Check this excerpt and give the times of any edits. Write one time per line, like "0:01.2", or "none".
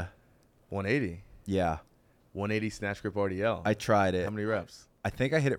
0:04.4